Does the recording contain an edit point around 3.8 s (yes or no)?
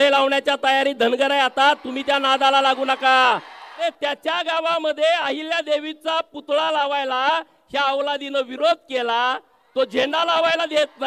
yes